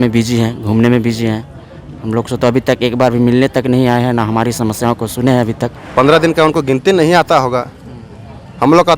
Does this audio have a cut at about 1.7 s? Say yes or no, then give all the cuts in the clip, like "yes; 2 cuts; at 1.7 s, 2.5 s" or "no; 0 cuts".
no; 1 cut; at 5.8 s